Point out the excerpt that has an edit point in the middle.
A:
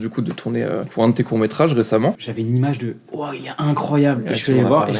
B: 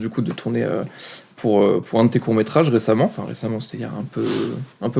A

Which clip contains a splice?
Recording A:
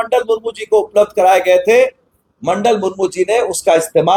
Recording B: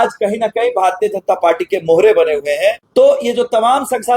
B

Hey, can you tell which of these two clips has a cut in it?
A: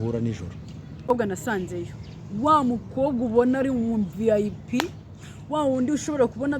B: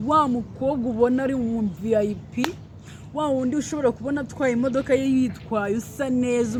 A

